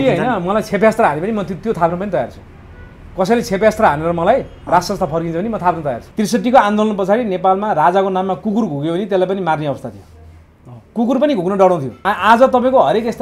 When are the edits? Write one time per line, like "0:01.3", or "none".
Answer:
0:06.1
0:12.0